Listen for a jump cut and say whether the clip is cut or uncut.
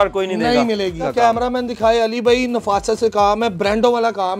cut